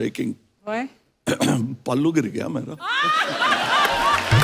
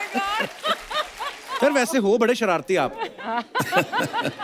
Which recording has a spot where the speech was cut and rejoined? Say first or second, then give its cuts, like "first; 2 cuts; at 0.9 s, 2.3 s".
second; 1 cut; at 1.6 s